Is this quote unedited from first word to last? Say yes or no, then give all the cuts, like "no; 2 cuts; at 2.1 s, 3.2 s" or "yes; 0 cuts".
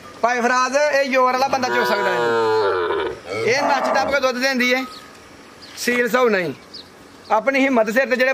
yes; 0 cuts